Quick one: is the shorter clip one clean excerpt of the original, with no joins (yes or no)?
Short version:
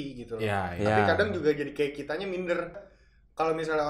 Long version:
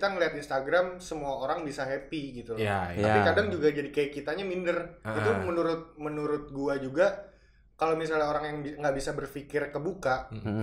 no